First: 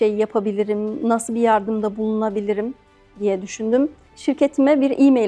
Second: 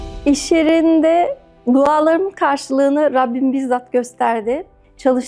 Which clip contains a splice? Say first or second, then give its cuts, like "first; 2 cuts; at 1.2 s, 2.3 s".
first; 1 cut; at 4.0 s